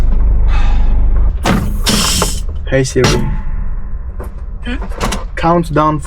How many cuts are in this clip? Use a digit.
1